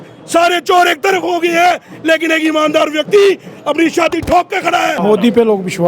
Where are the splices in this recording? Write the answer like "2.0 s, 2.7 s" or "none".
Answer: 4.9 s